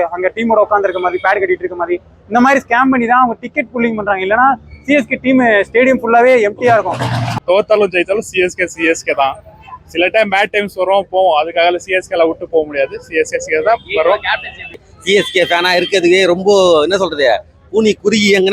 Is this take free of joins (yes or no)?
no